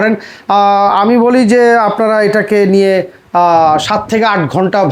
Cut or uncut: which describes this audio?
uncut